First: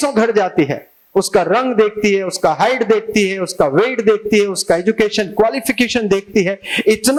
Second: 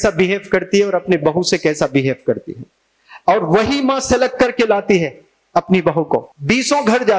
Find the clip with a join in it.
second; 1 cut; at 6.3 s

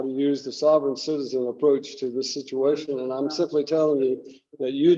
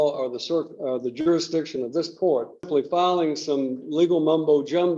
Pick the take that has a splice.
second; 1 cut; at 2.7 s

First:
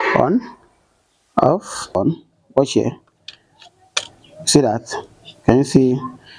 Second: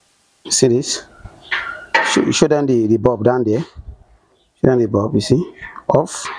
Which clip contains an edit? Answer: first; 1 cut; at 2.0 s

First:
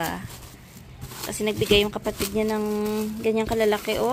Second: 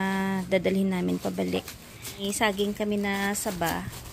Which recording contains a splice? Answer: second; 1 cut; at 2.3 s

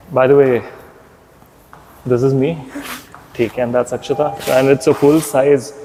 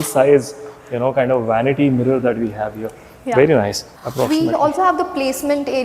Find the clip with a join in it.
second; 1 cut; at 3.8 s

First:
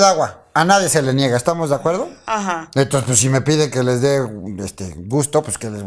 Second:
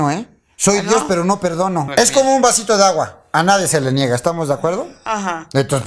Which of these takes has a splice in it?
second; 1 cut; at 1.9 s

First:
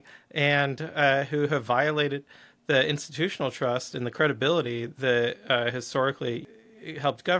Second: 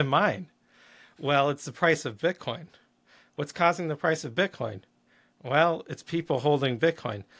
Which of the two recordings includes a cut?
first; 1 cut; at 6.5 s

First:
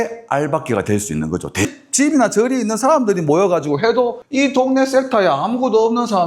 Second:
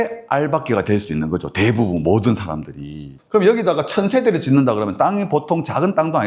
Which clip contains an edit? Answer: first; 2 cuts; at 1.7 s, 4.1 s

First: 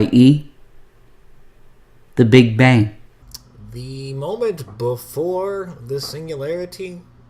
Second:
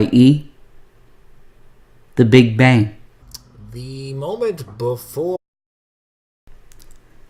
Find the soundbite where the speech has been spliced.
first; 1 cut; at 5.4 s

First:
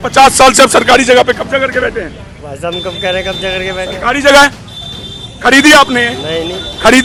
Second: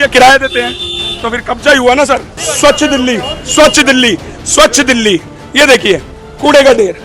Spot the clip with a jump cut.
second; 1 cut; at 2.4 s

